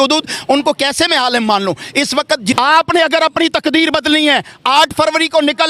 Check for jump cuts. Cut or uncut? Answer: cut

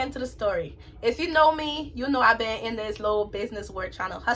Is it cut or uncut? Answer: uncut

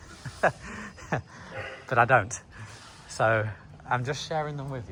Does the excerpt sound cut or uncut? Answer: uncut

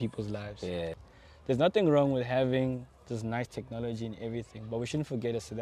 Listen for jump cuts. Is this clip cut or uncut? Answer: cut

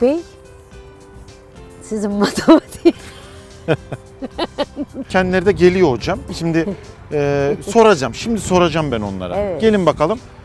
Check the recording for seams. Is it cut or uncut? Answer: cut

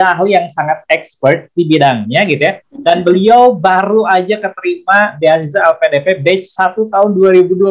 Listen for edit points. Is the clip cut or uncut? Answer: uncut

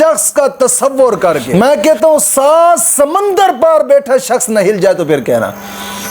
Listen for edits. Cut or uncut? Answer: cut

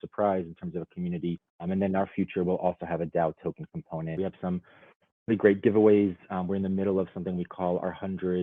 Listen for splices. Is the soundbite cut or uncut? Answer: cut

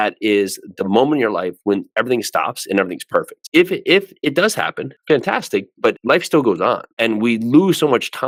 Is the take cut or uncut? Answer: uncut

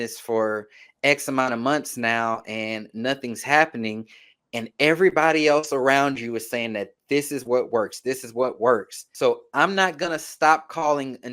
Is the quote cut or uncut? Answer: cut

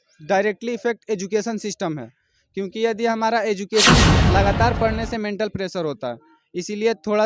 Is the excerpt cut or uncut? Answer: cut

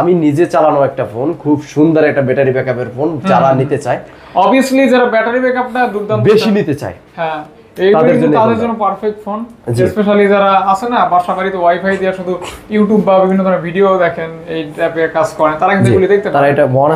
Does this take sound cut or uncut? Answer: uncut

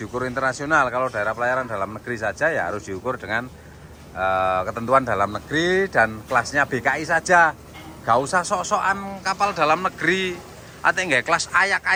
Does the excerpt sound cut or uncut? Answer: uncut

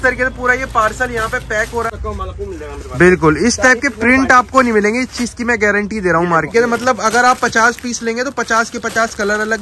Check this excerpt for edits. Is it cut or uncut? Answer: cut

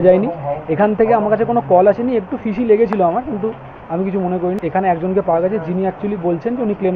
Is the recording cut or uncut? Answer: uncut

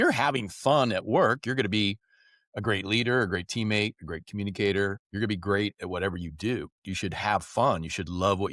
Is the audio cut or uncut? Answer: cut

